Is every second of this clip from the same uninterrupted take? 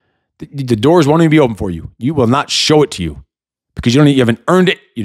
yes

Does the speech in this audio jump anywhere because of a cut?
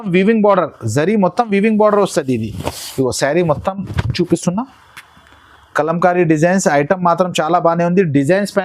no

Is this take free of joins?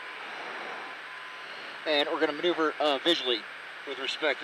no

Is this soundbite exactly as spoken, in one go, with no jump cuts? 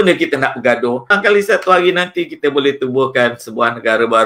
no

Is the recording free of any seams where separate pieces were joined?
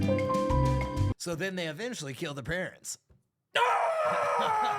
no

